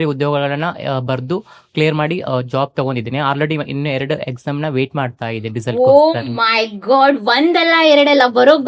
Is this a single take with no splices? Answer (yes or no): yes